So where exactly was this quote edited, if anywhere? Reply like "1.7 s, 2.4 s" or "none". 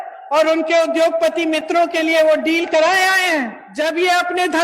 3.7 s

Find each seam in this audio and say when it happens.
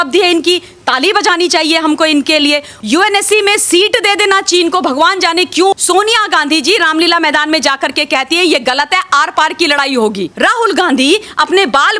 2.7 s, 5.7 s, 10.3 s

